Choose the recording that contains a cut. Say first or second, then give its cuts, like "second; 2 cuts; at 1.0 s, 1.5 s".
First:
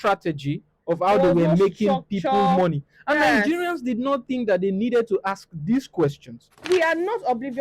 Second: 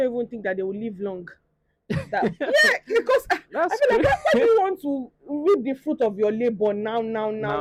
first; 1 cut; at 6.6 s